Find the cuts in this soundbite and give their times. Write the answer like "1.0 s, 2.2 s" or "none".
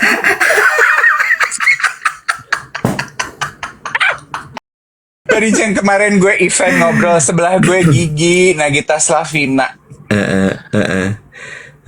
5.2 s